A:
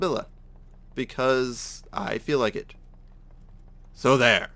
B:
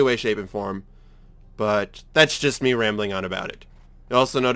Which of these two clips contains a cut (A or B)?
B